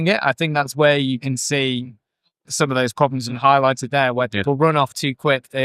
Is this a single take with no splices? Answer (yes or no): no